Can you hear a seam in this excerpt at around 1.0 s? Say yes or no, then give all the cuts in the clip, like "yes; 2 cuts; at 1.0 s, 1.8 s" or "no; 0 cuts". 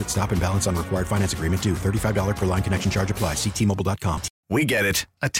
no; 1 cut; at 4.3 s